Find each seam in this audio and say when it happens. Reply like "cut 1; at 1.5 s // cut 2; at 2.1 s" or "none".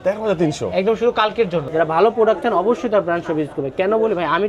cut 1; at 1.7 s